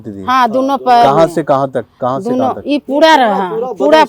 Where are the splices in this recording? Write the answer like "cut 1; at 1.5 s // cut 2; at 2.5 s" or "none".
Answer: none